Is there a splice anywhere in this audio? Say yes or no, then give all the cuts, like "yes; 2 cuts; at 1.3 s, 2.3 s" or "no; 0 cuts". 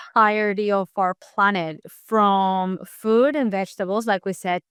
no; 0 cuts